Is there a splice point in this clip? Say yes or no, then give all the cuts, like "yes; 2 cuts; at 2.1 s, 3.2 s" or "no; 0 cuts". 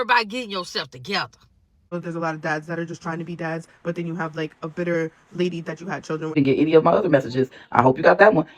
yes; 2 cuts; at 1.9 s, 6.3 s